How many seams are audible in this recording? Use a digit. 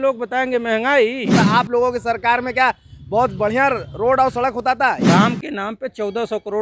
2